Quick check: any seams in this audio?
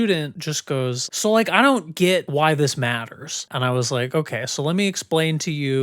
yes; 2 cuts; at 1.0 s, 2.3 s

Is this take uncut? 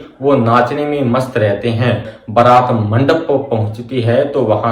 no; 1 cut; at 2.1 s

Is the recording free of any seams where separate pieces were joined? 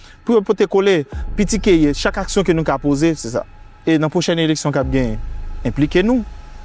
yes; 0 cuts

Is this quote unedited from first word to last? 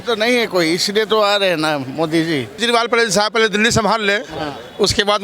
no; 1 cut; at 2.6 s

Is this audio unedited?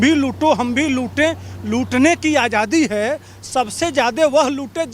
yes; 0 cuts

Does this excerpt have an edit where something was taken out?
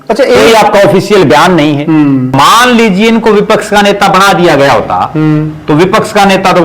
yes; 1 cut; at 2.3 s

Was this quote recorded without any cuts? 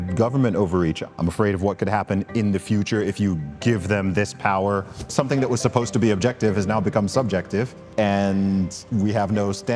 no; 3 cuts; at 1.0 s, 5.1 s, 7.8 s

